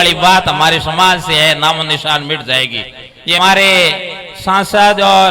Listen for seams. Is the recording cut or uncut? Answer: cut